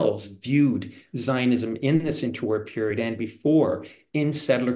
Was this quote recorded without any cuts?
yes; 0 cuts

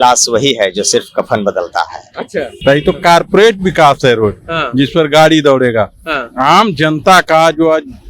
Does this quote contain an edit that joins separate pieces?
yes; 1 cut; at 2.5 s

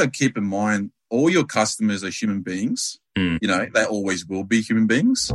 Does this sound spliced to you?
no; 0 cuts

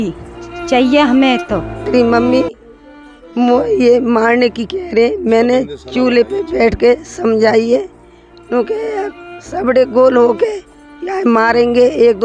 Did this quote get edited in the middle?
yes; 1 cut; at 1.8 s

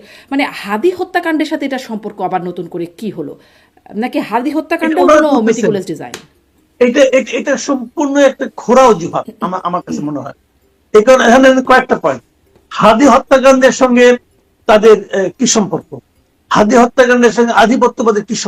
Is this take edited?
no; 0 cuts

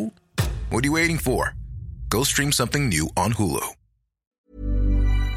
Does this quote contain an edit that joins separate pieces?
yes; 1 cut; at 4.4 s

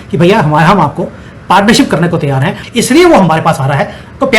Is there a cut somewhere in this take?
yes; 1 cut; at 2.6 s

